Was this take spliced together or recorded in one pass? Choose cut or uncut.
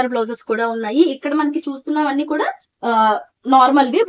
uncut